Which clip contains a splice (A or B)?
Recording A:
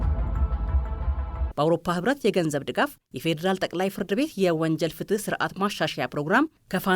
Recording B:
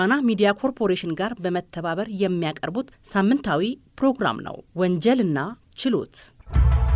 A